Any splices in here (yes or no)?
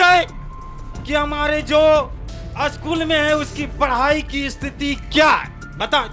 no